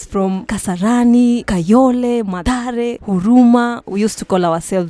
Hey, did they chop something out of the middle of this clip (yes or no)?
yes